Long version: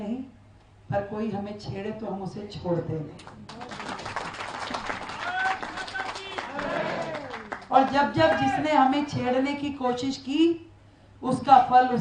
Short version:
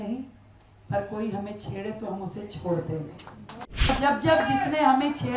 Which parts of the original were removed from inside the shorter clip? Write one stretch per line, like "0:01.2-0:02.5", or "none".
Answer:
0:03.9-0:07.8